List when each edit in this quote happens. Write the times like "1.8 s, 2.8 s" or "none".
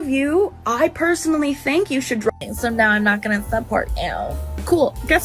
2.3 s